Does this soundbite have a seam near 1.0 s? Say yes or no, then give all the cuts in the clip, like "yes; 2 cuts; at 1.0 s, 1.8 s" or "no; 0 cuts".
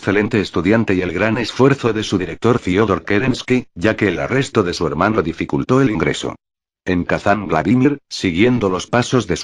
yes; 1 cut; at 1.0 s